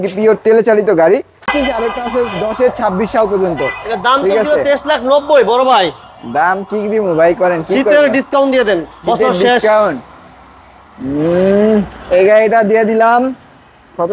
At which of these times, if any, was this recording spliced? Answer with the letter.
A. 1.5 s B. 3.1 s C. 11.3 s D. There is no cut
A